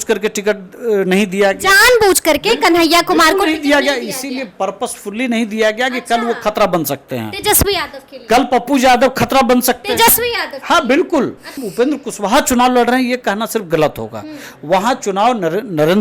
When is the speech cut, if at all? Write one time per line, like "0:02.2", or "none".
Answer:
0:11.6

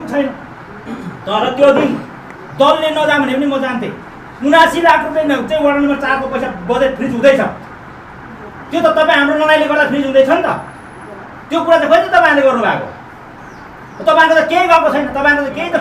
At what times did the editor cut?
none

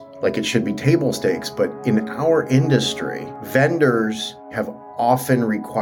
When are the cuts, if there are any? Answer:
0:04.5

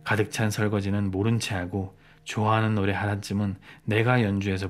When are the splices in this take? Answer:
none

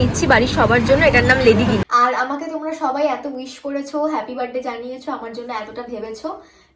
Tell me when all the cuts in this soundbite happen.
0:01.8

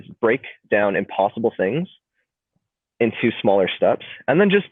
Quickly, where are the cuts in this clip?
none

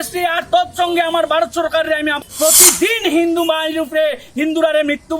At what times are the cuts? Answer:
0:02.2

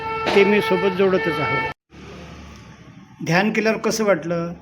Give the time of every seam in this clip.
0:01.8

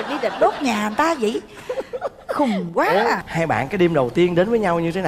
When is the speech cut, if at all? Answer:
0:03.3

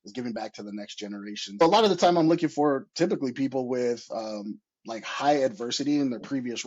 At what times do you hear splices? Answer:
0:01.6

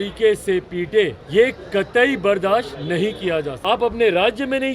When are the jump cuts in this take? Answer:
0:03.5

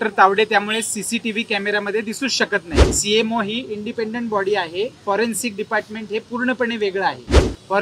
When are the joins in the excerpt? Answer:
0:02.8

